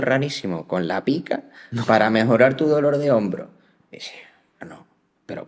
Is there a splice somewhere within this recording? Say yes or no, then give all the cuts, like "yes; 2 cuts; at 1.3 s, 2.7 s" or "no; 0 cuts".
no; 0 cuts